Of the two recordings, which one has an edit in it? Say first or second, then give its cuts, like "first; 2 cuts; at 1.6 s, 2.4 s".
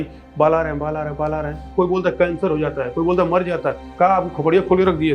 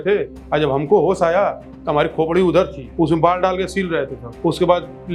first; 2 cuts; at 1.7 s, 3.9 s